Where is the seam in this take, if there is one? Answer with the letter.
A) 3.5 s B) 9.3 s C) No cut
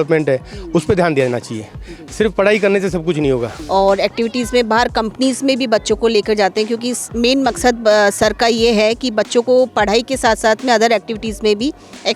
A